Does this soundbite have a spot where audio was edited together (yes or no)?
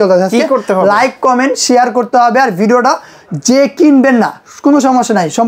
no